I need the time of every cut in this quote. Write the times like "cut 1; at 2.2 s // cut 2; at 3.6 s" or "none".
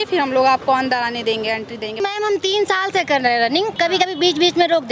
cut 1; at 2.0 s // cut 2; at 3.8 s